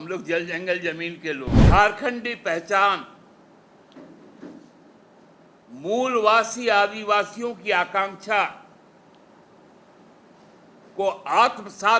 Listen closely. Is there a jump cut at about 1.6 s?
yes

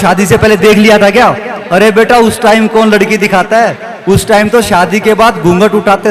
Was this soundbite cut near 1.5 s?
no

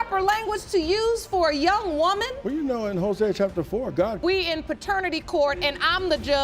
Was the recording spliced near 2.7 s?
no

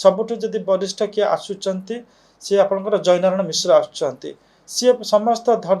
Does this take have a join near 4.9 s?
no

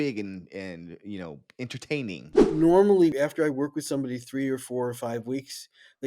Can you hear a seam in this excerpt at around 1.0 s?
no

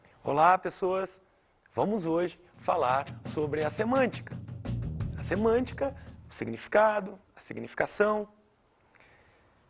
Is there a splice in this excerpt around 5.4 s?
yes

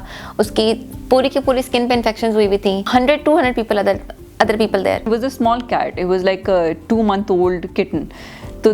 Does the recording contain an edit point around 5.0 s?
yes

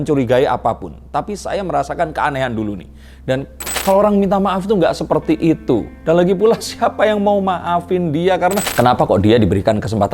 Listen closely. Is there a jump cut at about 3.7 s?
yes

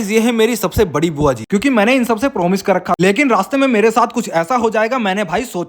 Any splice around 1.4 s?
yes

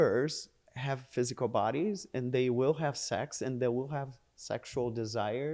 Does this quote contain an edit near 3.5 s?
no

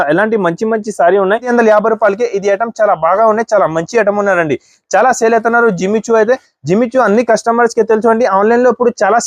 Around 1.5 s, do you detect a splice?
yes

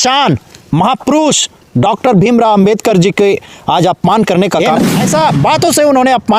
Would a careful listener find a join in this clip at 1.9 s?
no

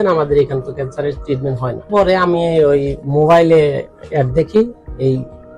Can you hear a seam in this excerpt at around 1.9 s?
yes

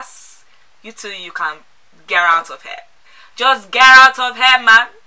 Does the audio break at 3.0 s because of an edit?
no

